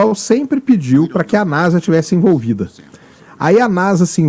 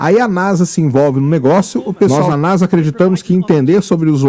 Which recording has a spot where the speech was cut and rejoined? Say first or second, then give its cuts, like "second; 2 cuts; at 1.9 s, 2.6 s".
second; 1 cut; at 2.1 s